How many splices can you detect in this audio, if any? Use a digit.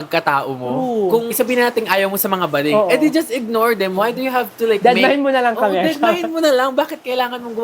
1